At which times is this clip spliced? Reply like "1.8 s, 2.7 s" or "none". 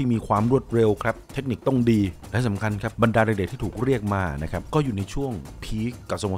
none